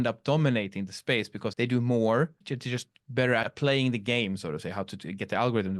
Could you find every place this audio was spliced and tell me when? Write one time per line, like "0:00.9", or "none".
0:01.5
0:02.5
0:03.5